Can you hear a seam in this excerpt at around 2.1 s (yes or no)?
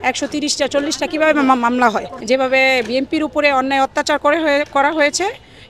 yes